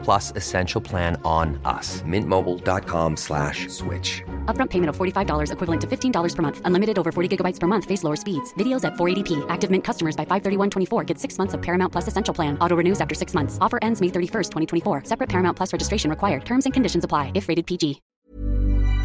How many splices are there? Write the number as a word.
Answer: one